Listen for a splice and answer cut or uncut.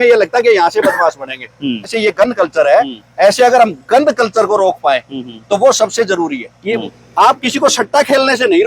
cut